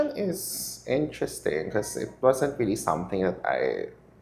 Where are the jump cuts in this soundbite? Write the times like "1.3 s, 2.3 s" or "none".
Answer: none